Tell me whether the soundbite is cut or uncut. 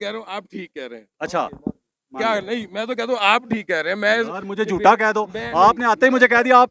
uncut